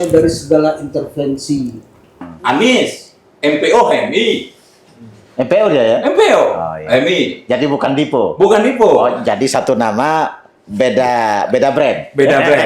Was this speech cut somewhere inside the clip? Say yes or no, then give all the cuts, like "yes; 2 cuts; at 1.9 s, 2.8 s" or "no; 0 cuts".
yes; 1 cut; at 2.3 s